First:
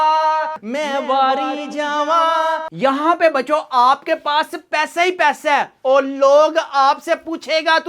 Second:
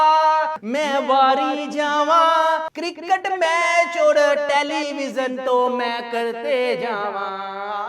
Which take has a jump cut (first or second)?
first